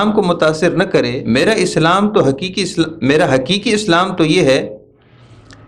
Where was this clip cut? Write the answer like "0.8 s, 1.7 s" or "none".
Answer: 1.2 s